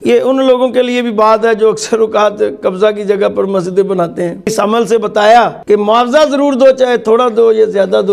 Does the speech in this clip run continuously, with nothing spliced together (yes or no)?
no